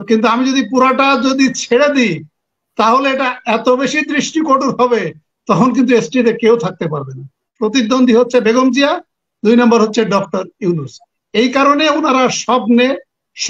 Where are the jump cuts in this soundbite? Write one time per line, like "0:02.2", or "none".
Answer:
0:07.5

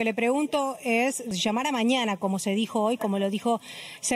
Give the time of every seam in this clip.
0:01.3

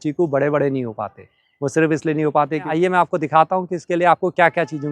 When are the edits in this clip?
0:02.7

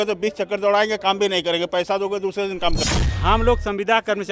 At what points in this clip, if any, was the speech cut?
0:02.8

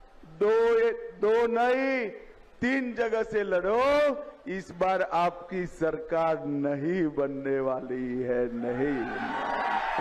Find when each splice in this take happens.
none

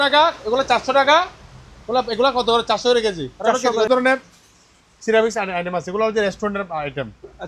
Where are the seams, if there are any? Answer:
0:03.9

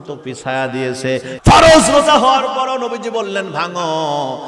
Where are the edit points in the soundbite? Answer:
0:01.3

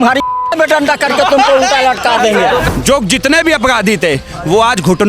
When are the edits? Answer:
0:02.7

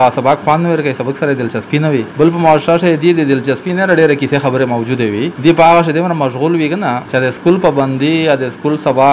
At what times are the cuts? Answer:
0:02.1
0:05.3
0:07.0

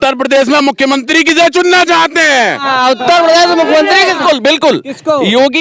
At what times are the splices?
none

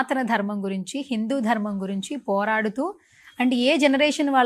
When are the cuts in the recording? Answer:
none

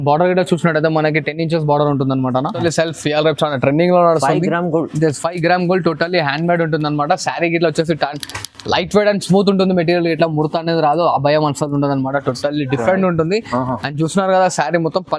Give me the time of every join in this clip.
0:02.6

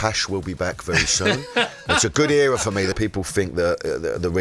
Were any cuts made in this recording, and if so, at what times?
0:03.0

